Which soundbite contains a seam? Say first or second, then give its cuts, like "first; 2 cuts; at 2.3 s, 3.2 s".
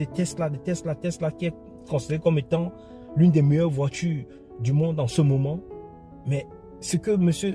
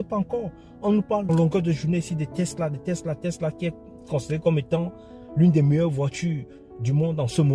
second; 1 cut; at 1.3 s